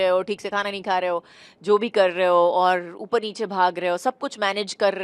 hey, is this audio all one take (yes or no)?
yes